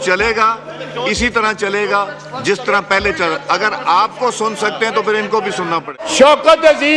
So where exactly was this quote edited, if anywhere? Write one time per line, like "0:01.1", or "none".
0:02.1
0:06.0